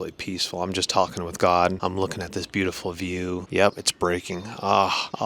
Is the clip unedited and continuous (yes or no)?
no